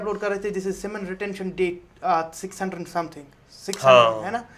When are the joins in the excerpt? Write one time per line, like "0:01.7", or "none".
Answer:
none